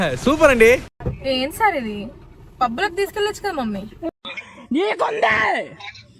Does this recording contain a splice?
yes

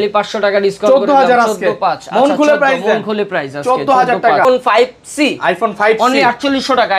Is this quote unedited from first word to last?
no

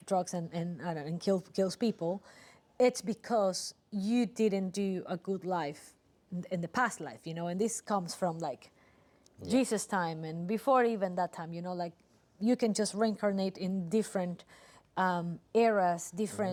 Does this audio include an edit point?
no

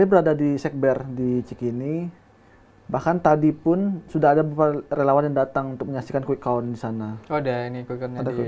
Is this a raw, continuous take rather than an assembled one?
yes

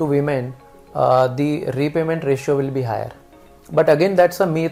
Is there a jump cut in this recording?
no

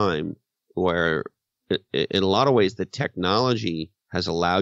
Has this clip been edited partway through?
no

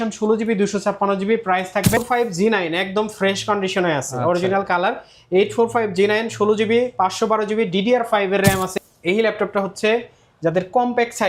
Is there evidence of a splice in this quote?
yes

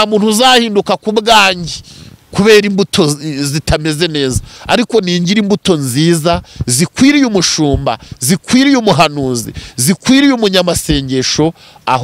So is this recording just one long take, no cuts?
yes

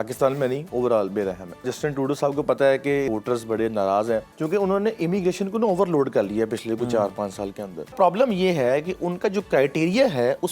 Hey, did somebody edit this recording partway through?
yes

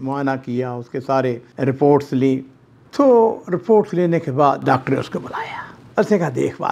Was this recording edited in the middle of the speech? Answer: yes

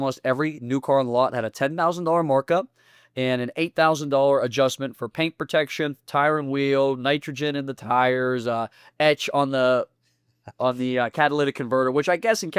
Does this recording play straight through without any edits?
yes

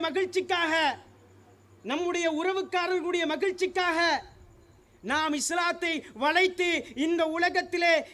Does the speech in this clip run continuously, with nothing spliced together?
yes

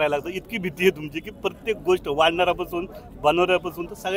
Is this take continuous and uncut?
yes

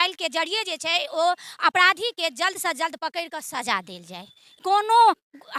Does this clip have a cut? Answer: yes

